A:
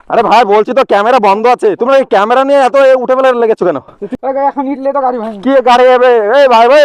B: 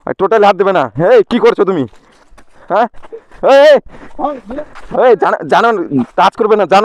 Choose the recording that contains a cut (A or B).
A